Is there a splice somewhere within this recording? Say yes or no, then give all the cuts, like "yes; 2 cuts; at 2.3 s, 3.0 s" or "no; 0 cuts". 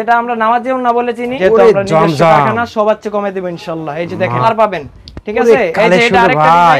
yes; 2 cuts; at 1.3 s, 4.4 s